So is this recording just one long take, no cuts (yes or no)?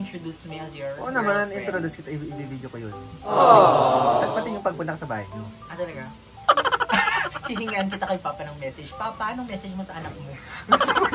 yes